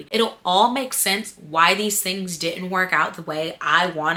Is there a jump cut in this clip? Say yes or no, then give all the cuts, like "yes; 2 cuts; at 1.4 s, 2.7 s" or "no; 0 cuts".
no; 0 cuts